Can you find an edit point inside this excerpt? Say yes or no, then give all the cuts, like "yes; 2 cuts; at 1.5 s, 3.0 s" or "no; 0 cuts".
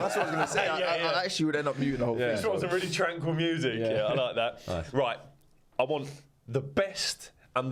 no; 0 cuts